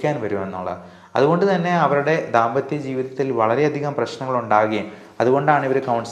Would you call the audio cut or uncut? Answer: uncut